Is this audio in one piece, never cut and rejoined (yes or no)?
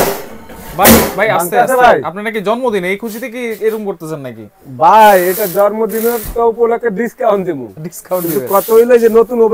yes